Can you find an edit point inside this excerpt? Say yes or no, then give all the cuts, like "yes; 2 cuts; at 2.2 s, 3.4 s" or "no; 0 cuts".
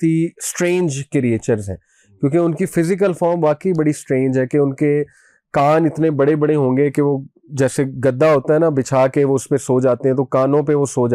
no; 0 cuts